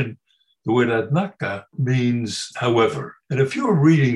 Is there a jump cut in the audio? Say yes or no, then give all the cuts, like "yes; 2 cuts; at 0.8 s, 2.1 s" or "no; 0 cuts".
yes; 3 cuts; at 1.7 s, 2.5 s, 3.1 s